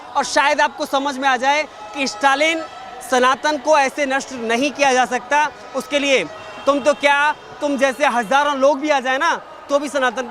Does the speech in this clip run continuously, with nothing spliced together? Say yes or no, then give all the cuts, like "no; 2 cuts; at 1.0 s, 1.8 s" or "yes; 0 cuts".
yes; 0 cuts